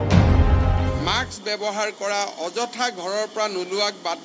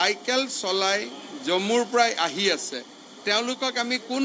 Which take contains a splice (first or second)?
first